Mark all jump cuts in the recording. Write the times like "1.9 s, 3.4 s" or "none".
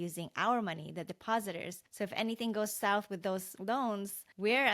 1.8 s, 3.7 s